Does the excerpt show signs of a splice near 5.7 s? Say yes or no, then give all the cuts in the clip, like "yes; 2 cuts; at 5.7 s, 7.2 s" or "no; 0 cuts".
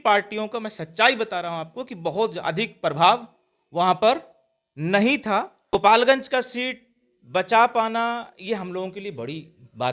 yes; 1 cut; at 5.7 s